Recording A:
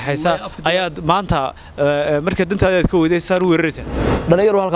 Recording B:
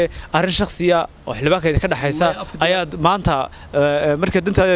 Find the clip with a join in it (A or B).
A